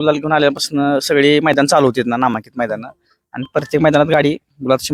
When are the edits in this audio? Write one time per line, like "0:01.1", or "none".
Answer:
none